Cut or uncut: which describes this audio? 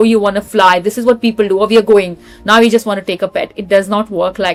uncut